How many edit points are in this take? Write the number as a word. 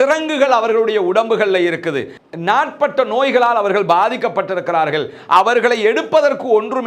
zero